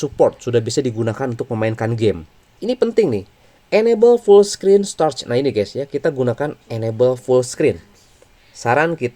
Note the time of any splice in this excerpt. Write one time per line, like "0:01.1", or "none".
0:02.5

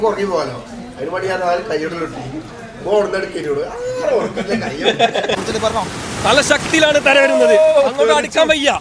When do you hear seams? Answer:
0:05.3

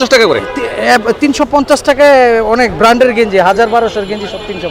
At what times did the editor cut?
none

